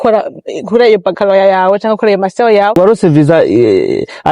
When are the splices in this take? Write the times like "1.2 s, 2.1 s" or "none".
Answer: 2.8 s